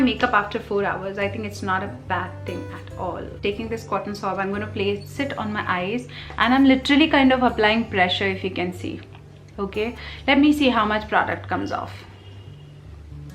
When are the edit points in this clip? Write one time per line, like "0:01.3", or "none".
0:03.3